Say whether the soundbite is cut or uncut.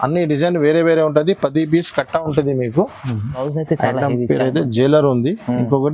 cut